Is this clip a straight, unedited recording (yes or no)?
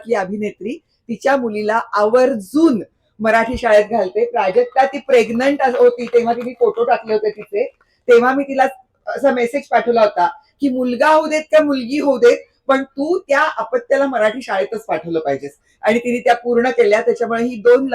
no